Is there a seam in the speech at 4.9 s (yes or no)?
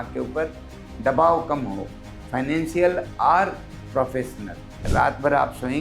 yes